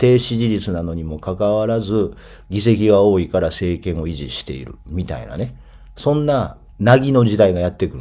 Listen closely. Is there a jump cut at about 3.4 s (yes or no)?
no